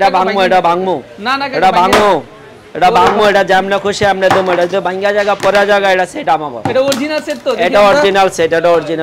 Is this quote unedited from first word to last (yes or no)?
yes